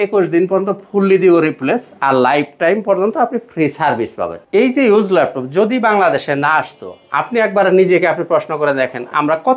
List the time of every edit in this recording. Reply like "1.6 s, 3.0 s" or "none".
4.4 s